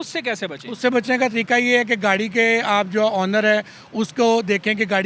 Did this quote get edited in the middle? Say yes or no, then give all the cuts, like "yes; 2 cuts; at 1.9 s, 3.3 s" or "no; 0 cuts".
no; 0 cuts